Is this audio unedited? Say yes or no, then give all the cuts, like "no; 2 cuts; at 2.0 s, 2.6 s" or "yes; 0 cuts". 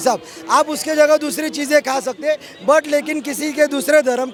yes; 0 cuts